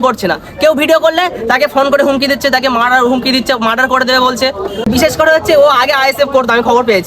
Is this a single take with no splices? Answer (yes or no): no